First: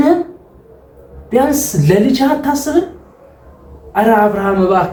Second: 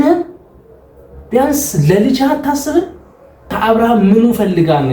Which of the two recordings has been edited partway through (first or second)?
second